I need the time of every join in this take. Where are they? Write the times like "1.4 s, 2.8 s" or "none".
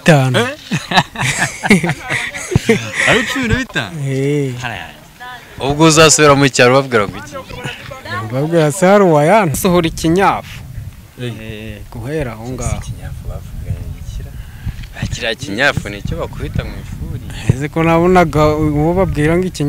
9.6 s